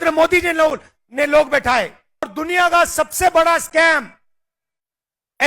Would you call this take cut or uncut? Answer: cut